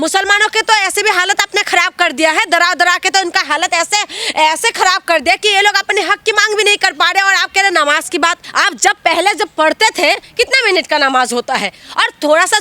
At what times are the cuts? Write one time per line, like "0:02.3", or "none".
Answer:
0:08.5